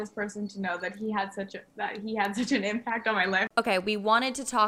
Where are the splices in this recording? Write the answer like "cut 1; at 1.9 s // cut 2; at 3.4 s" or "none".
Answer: cut 1; at 3.5 s